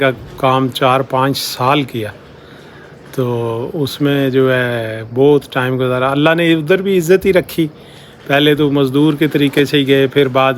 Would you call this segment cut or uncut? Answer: uncut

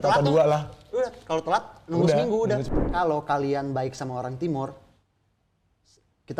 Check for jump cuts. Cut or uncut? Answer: cut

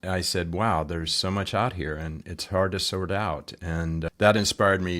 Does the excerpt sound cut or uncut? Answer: cut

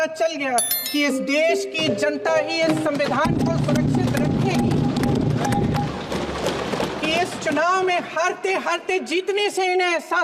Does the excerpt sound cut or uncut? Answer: uncut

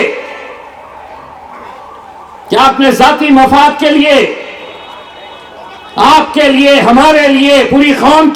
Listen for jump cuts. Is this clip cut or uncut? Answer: uncut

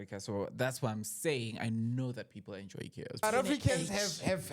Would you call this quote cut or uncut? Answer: cut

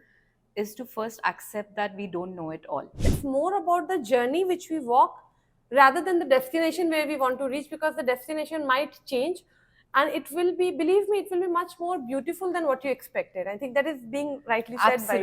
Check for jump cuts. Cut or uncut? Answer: cut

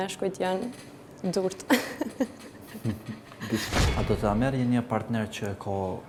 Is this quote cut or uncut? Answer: uncut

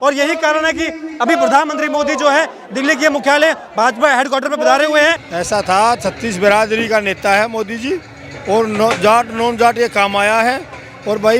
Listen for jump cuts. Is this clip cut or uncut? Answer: cut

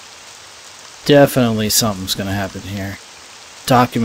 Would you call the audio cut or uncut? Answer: uncut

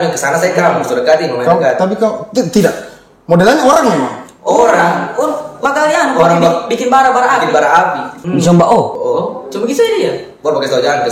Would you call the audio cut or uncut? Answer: cut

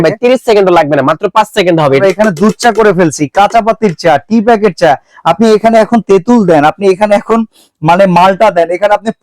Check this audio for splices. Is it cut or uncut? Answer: cut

